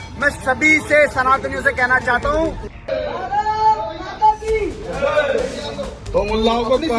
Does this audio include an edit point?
yes; 2 cuts; at 2.7 s, 5.9 s

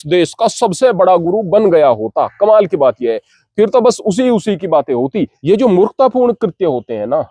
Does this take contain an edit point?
yes; 1 cut; at 5.3 s

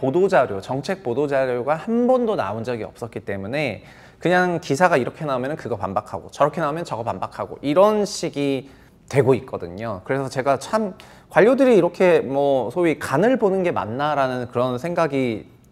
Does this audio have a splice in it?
no; 0 cuts

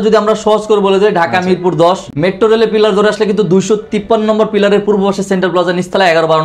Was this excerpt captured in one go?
yes; 0 cuts

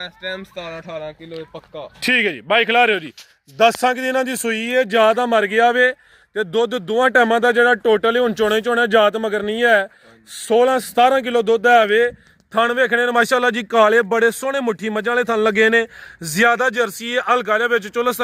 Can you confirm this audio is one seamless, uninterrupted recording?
yes; 0 cuts

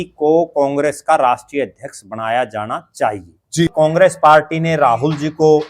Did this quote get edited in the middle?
yes; 1 cut; at 3.7 s

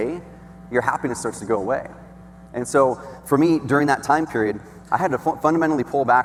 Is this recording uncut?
yes; 0 cuts

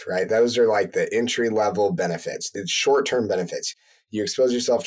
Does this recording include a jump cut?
yes; 1 cut; at 2.5 s

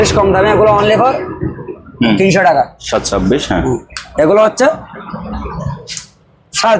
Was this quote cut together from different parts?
yes; 1 cut; at 2.8 s

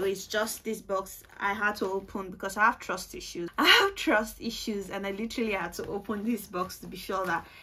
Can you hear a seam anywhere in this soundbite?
yes; 1 cut; at 3.5 s

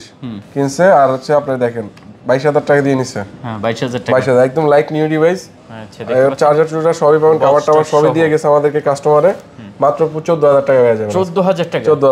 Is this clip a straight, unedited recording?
yes; 0 cuts

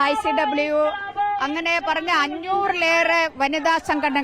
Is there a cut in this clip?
no; 0 cuts

